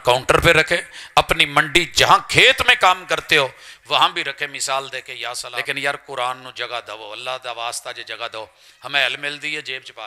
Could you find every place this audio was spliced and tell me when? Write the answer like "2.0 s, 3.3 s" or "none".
5.4 s